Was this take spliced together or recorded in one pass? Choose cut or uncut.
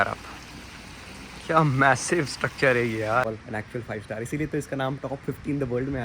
cut